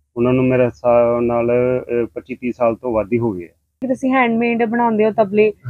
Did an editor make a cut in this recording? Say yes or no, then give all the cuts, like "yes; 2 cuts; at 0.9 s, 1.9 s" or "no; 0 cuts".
yes; 1 cut; at 3.8 s